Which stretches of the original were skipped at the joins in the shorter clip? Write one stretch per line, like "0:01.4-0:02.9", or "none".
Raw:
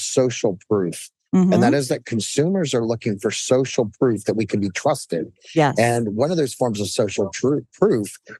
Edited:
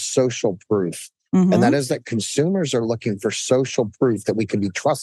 none